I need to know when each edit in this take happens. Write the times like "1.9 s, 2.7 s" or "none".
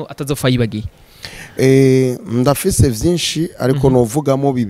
none